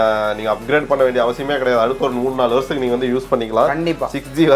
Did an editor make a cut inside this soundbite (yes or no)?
no